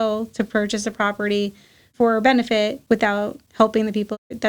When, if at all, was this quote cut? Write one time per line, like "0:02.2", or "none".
0:03.0